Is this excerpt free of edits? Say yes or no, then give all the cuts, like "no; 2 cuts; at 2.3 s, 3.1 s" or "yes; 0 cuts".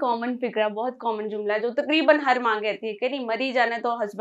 yes; 0 cuts